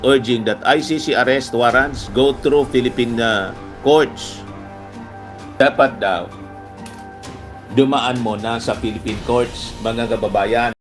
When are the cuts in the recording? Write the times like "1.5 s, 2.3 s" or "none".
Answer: none